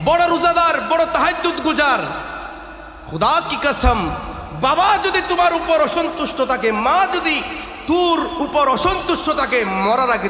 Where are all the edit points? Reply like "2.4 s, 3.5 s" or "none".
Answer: none